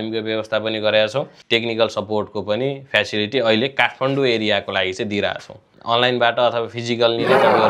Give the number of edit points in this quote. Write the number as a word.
two